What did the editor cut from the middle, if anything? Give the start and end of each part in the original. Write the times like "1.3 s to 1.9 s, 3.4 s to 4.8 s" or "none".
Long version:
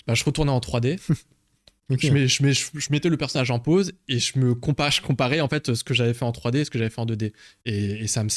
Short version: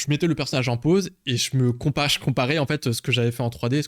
none